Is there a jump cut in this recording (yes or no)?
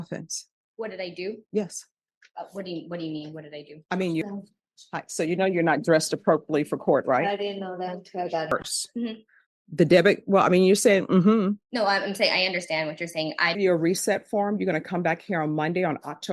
yes